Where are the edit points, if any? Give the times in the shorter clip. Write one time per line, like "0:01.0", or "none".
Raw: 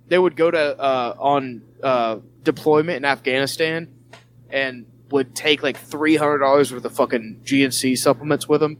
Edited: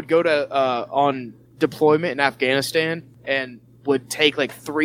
0:01.4
0:03.1